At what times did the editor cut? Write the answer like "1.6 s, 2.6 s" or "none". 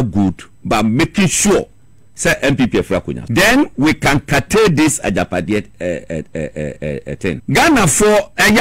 3.2 s, 7.4 s